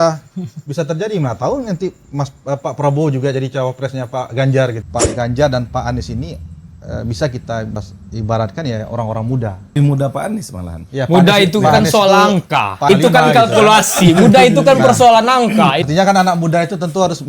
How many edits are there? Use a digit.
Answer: 5